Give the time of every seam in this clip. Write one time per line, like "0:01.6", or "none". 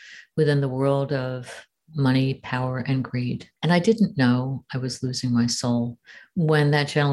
0:03.5